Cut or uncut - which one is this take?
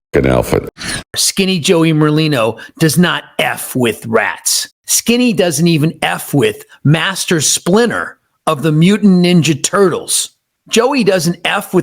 cut